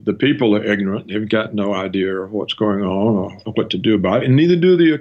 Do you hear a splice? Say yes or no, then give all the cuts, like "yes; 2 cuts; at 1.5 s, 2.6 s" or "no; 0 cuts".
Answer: yes; 1 cut; at 3.4 s